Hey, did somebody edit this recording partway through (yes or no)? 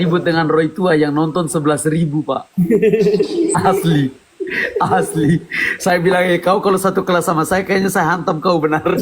no